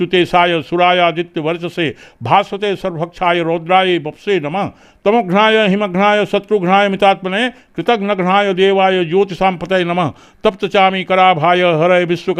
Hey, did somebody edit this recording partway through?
no; 0 cuts

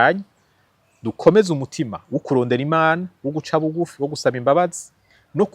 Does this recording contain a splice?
no; 0 cuts

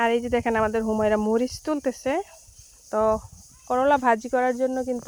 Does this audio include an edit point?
no; 0 cuts

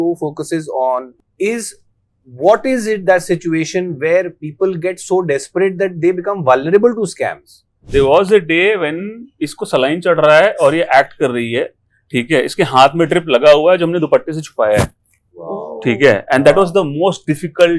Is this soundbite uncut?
no; 2 cuts; at 1.2 s, 7.9 s

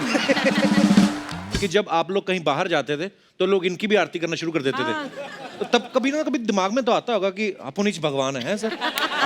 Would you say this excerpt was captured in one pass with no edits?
no; 1 cut; at 1.4 s

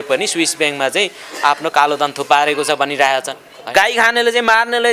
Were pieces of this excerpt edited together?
yes; 1 cut; at 3.6 s

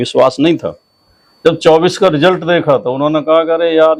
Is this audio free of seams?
yes; 0 cuts

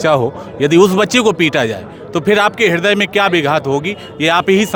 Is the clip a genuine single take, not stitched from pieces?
yes; 0 cuts

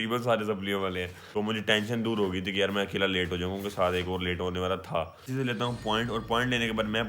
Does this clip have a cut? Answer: yes; 2 cuts; at 1.2 s, 5.3 s

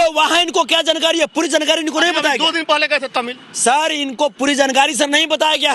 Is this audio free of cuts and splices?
yes; 0 cuts

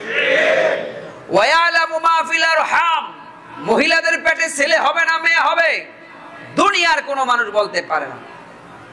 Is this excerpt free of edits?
yes; 0 cuts

